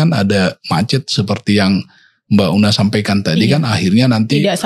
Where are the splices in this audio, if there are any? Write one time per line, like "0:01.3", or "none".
none